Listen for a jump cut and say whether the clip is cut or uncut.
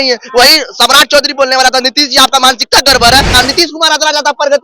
cut